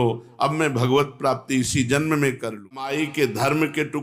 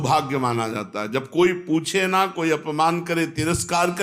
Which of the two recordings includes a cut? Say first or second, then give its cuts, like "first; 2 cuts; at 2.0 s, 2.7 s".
first; 1 cut; at 2.9 s